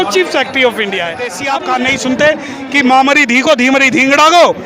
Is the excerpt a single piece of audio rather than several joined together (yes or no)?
no